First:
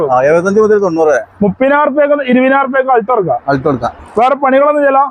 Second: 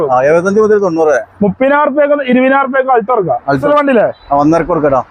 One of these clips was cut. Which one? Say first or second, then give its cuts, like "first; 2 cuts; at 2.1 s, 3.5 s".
second; 1 cut; at 3.6 s